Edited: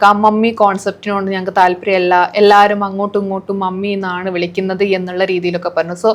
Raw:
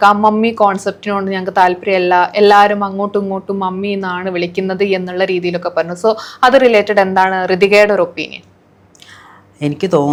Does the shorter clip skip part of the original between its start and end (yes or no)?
no